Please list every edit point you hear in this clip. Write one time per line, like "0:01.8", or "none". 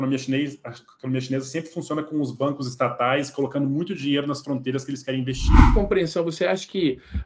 0:05.7